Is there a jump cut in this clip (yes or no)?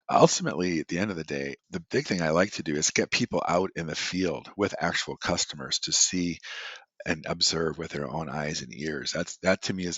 yes